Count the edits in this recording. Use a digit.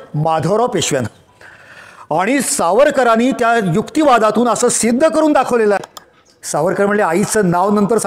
1